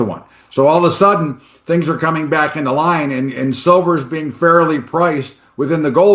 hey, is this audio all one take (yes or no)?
yes